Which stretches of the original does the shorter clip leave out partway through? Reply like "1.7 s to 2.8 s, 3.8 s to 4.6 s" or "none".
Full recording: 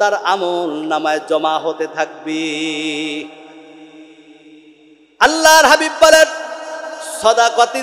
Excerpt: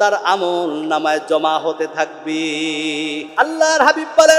3.3 s to 5.1 s